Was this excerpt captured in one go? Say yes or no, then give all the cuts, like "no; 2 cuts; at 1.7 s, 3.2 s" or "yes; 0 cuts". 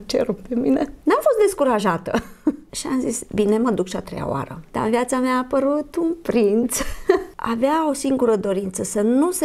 no; 4 cuts; at 1.0 s, 2.7 s, 4.6 s, 7.4 s